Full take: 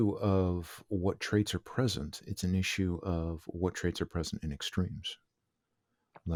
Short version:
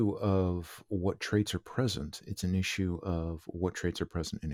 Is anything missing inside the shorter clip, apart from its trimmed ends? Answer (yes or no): no